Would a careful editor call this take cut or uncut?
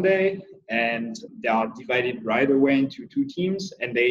cut